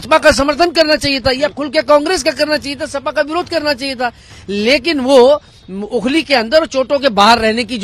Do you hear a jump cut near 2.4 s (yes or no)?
no